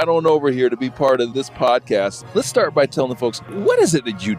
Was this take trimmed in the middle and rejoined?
yes; 2 cuts; at 2.2 s, 3.5 s

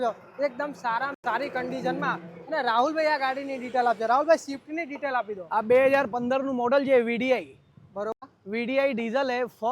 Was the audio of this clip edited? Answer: yes; 1 cut; at 8.1 s

